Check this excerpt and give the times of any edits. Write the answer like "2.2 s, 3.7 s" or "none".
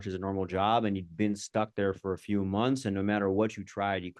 none